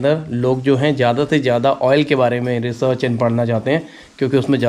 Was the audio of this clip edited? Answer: no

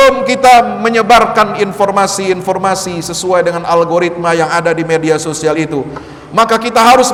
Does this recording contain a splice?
no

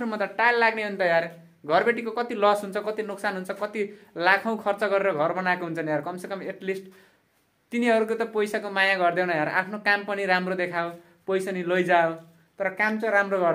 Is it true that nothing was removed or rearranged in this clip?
yes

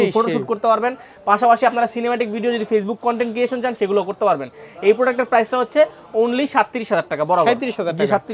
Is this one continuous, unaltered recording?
yes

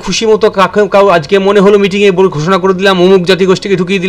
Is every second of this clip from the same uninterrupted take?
yes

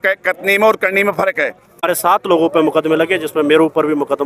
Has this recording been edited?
yes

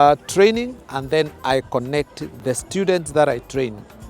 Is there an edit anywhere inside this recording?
yes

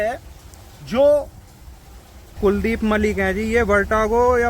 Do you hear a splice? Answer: yes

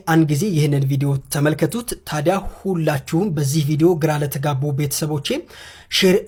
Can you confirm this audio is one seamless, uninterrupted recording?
yes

